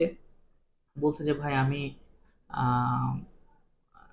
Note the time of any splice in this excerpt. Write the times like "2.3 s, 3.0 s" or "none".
none